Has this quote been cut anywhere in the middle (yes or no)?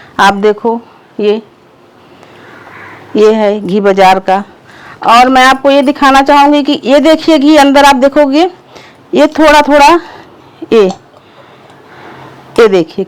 no